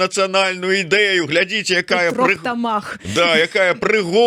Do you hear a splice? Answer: no; 0 cuts

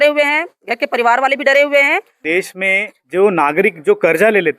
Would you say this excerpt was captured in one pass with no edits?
no; 1 cut; at 2.2 s

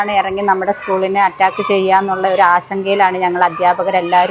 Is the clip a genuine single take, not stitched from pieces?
yes; 0 cuts

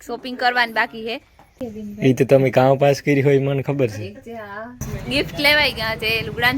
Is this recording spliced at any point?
yes; 2 cuts; at 1.6 s, 4.9 s

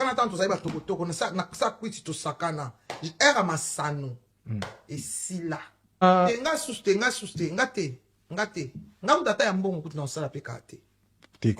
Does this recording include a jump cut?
yes; 1 cut; at 6.0 s

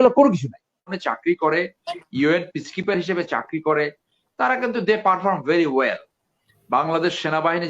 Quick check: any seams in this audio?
yes; 1 cut; at 1.0 s

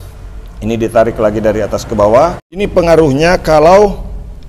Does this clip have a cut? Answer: yes; 1 cut; at 2.6 s

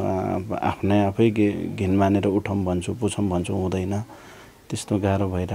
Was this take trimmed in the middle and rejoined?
no; 0 cuts

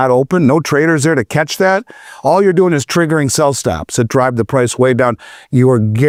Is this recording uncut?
yes; 0 cuts

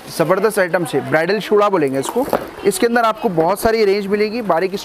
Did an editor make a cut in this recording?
no; 0 cuts

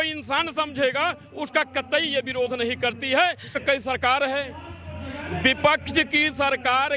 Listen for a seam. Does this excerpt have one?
yes; 1 cut; at 3.6 s

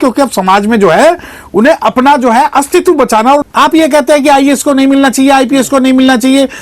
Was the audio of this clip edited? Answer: yes; 1 cut; at 3.4 s

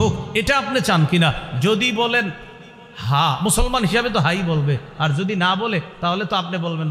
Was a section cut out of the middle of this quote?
no; 0 cuts

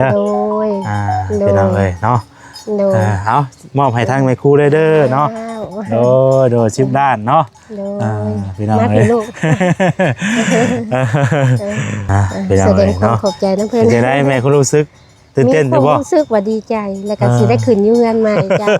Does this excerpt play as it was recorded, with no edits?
no; 1 cut; at 11.9 s

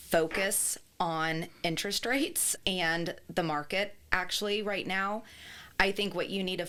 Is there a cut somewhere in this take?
no; 0 cuts

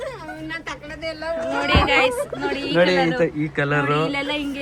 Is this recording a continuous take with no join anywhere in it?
yes; 0 cuts

